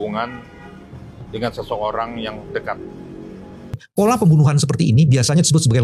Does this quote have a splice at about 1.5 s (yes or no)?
no